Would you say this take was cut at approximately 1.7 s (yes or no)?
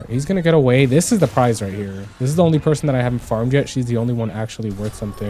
no